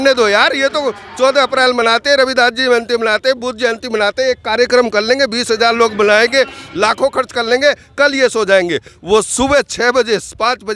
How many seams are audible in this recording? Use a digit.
0